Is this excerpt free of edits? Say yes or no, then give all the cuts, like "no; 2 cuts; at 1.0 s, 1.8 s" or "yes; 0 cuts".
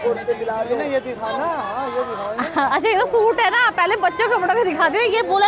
yes; 0 cuts